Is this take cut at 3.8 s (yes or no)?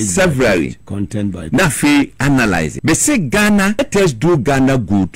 yes